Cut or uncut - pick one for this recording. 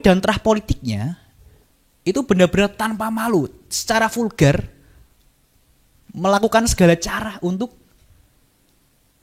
uncut